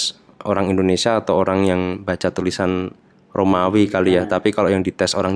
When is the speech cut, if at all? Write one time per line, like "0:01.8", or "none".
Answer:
none